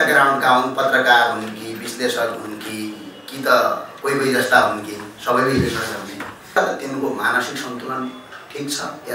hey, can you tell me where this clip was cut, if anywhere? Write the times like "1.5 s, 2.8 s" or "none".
6.6 s